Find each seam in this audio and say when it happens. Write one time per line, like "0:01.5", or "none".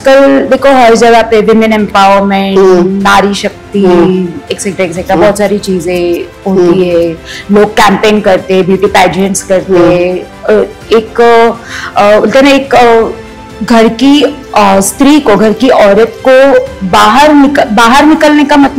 none

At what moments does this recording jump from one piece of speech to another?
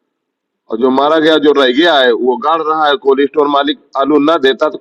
none

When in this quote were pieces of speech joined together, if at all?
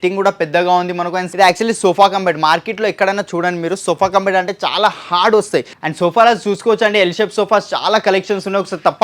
0:01.2
0:05.8

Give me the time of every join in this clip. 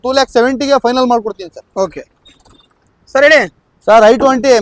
none

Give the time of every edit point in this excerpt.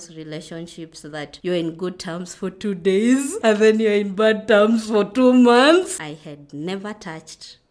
0:01.3
0:03.3
0:05.9

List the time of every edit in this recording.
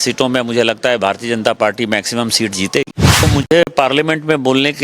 0:03.2

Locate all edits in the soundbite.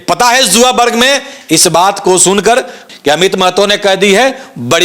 0:02.8

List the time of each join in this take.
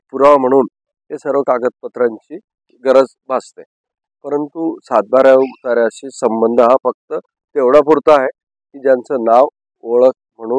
0:02.7

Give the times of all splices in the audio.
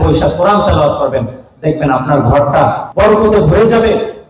0:02.8

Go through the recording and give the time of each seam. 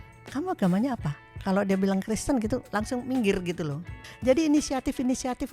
0:04.0

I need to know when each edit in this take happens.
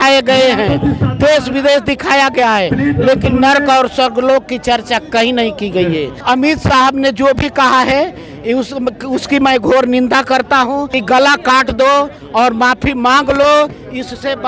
0:06.1
0:10.9

